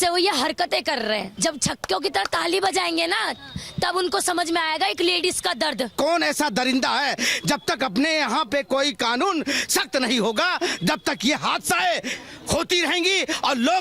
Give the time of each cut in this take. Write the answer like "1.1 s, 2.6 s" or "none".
1.3 s, 5.9 s

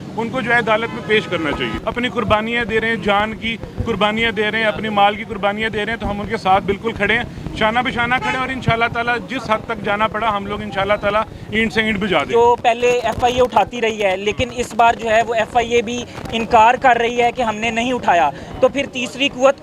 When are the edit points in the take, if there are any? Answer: 1.8 s, 12.3 s

